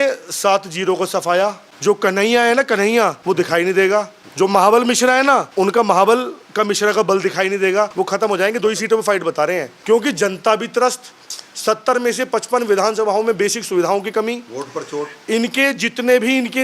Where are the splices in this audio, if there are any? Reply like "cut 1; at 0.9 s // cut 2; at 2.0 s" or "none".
cut 1; at 1.7 s // cut 2; at 3.2 s // cut 3; at 4.2 s // cut 4; at 5.5 s // cut 5; at 7.9 s // cut 6; at 9.7 s

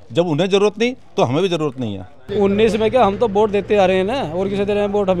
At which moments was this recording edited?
cut 1; at 2.2 s

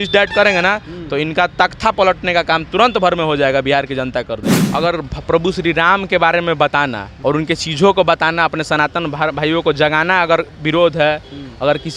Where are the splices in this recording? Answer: cut 1; at 4.6 s // cut 2; at 7.0 s

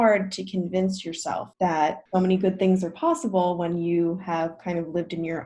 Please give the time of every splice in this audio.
cut 1; at 1.5 s // cut 2; at 2.0 s

